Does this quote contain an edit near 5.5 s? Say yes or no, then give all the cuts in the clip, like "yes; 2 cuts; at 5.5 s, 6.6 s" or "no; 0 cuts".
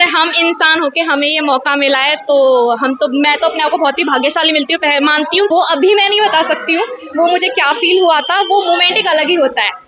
yes; 1 cut; at 5.5 s